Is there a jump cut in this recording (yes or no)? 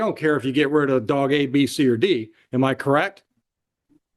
no